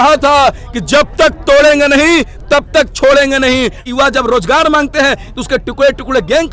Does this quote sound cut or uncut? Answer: cut